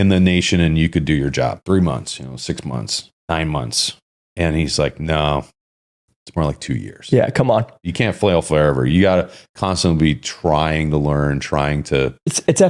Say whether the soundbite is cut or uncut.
cut